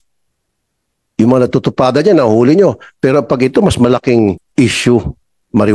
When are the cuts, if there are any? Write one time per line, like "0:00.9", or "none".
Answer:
0:04.4